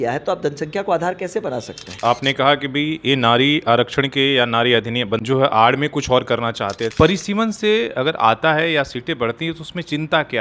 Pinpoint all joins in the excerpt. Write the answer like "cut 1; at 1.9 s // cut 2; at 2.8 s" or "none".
cut 1; at 2.0 s // cut 2; at 6.9 s